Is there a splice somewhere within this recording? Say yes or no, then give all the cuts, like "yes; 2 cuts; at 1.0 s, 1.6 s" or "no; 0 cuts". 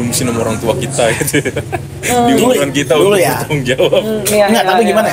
no; 0 cuts